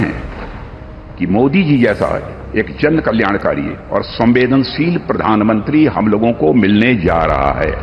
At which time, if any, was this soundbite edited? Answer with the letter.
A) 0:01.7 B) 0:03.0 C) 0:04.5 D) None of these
D